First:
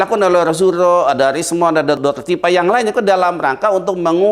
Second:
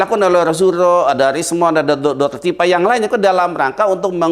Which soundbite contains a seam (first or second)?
first